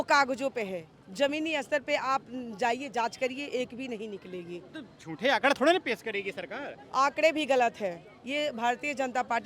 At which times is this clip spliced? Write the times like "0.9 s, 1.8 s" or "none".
none